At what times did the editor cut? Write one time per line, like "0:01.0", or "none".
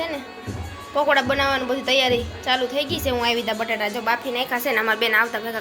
none